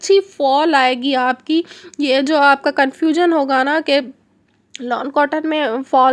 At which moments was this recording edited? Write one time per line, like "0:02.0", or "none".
none